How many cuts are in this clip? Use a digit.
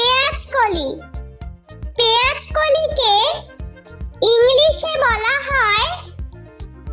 0